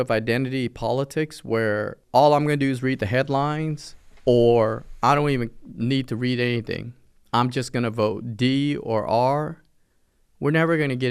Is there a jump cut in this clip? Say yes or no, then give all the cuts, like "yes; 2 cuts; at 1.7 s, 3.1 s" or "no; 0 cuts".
yes; 1 cut; at 2.0 s